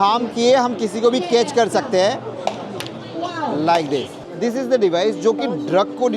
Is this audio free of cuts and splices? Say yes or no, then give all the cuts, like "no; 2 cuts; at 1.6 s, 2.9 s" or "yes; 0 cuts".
no; 1 cut; at 4.2 s